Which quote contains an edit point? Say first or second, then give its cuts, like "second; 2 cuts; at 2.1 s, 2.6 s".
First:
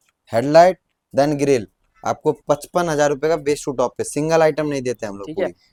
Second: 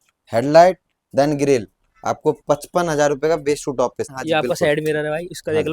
second; 1 cut; at 4.1 s